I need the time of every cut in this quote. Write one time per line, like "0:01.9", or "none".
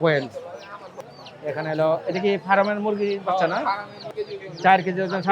0:01.0
0:04.0